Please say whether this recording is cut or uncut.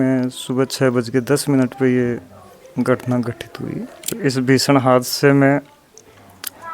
cut